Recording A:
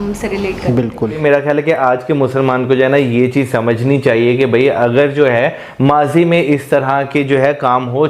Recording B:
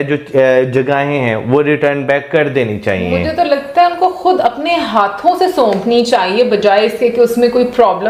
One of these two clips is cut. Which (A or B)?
A